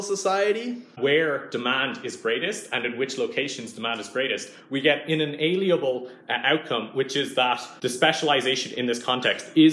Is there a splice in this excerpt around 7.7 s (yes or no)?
yes